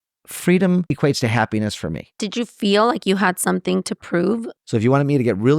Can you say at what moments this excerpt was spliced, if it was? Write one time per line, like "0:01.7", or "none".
0:00.9
0:02.2
0:04.6